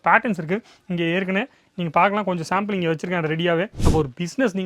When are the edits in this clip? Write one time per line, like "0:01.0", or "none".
0:03.8